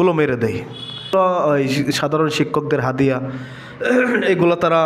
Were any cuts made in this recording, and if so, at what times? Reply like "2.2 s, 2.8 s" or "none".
1.1 s